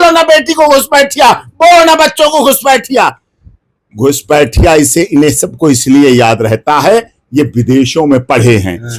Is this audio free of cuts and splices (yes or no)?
yes